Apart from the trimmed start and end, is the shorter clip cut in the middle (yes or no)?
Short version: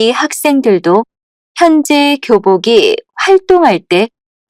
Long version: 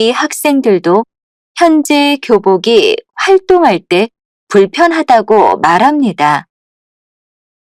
no